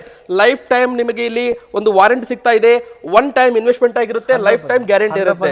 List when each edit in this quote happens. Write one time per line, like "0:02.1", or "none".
none